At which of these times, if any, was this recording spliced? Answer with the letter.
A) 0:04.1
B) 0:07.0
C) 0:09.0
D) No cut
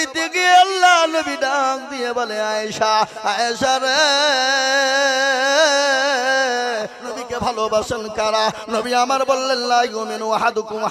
B